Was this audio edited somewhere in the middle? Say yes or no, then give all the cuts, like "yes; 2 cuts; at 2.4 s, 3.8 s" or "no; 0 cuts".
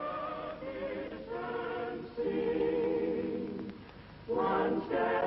no; 0 cuts